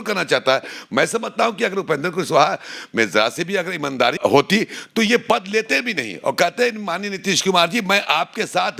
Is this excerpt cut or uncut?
cut